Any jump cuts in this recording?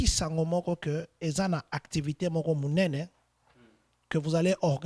no; 0 cuts

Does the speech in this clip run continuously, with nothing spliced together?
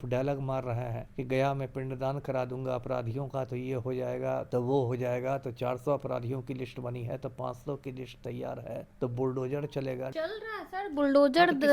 no; 4 cuts; at 1.0 s, 4.5 s, 8.9 s, 10.1 s

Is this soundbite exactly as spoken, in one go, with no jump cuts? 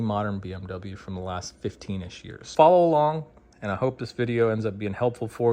no; 1 cut; at 2.4 s

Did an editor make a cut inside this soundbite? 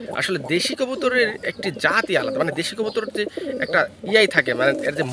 no; 0 cuts

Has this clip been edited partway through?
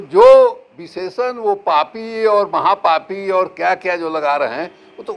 no; 0 cuts

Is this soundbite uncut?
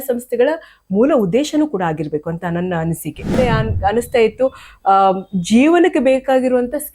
no; 1 cut; at 3.4 s

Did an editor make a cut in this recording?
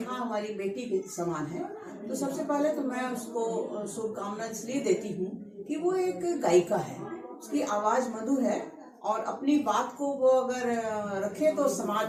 no; 0 cuts

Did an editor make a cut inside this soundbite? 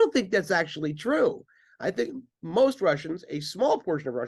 no; 0 cuts

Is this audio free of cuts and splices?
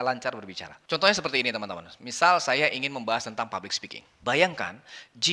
no; 1 cut; at 4.0 s

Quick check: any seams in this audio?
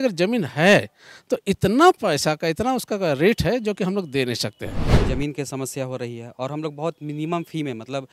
yes; 1 cut; at 5.0 s

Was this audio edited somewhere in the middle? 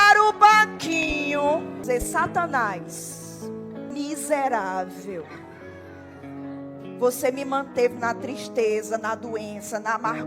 yes; 2 cuts; at 1.8 s, 3.9 s

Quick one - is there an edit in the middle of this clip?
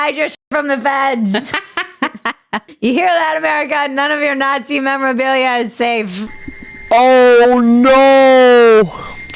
no; 0 cuts

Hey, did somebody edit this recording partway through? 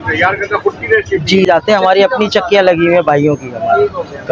yes; 1 cut; at 1.5 s

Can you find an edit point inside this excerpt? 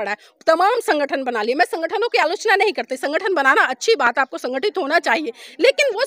no; 0 cuts

